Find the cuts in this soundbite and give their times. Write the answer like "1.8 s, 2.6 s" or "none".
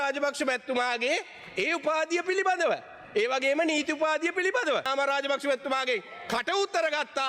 4.9 s